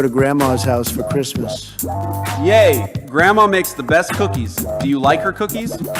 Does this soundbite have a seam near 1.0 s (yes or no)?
no